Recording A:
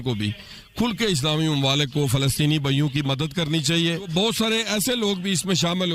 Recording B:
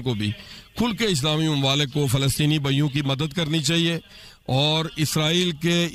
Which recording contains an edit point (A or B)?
A